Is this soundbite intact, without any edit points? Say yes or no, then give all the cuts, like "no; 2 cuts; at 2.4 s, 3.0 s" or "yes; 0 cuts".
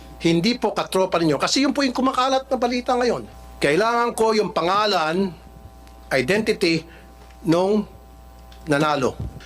no; 1 cut; at 3.3 s